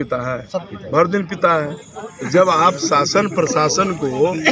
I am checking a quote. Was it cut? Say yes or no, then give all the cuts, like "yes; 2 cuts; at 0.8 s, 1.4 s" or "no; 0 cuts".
no; 0 cuts